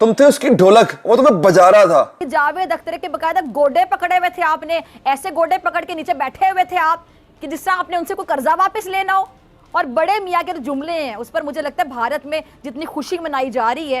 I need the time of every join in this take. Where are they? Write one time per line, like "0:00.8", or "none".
0:02.2